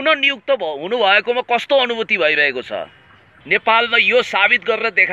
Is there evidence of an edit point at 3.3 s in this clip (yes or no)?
yes